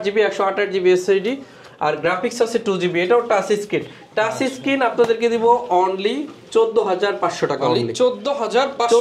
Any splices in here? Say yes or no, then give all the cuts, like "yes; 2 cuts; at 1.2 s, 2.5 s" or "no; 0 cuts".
no; 0 cuts